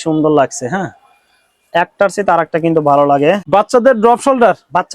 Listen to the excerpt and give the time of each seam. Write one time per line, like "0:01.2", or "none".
0:03.4